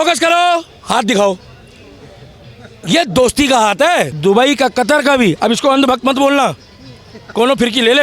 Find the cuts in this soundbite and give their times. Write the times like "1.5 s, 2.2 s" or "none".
4.1 s